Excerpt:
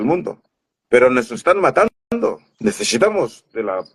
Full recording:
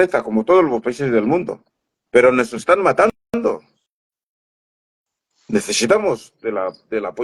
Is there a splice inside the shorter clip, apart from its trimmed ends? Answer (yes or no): yes